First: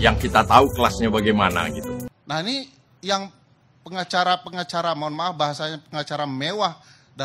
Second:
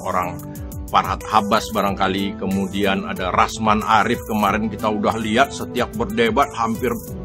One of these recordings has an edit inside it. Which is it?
first; 1 cut; at 2.1 s

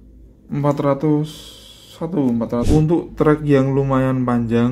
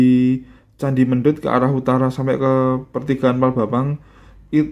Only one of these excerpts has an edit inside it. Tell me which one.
first; 1 cut; at 2.7 s

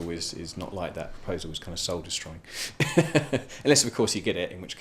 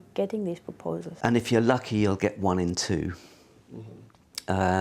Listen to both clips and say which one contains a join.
second; 1 cut; at 1.1 s

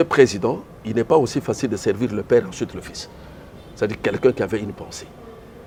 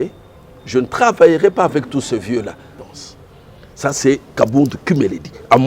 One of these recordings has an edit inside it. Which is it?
second; 1 cut; at 2.8 s

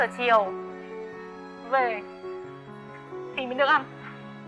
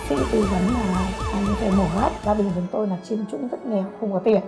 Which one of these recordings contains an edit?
second; 1 cut; at 2.2 s

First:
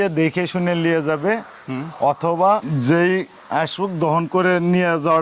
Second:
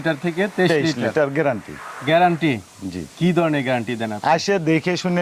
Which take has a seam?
first; 1 cut; at 2.7 s

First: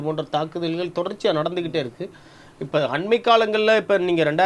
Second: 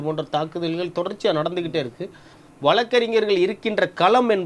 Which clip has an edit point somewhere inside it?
second; 1 cut; at 2.4 s

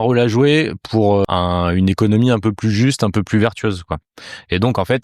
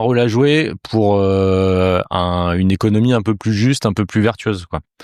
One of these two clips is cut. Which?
first; 1 cut; at 1.2 s

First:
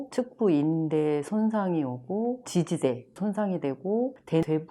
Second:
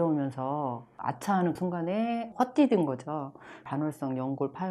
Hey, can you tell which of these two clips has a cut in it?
second; 2 cuts; at 1.6 s, 3.6 s

